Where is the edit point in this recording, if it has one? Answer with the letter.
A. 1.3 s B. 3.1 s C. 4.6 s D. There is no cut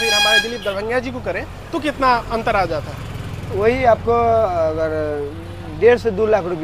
D